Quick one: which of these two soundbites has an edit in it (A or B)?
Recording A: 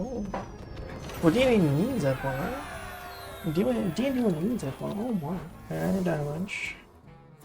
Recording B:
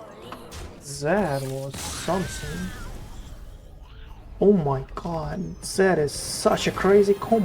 A